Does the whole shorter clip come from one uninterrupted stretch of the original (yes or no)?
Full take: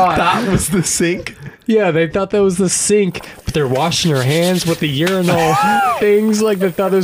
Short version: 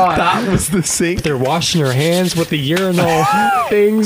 no